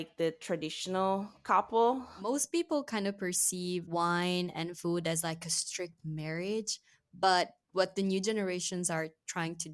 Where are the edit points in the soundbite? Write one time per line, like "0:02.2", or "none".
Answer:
0:02.2
0:03.9